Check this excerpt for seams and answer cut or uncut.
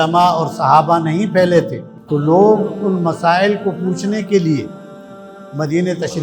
uncut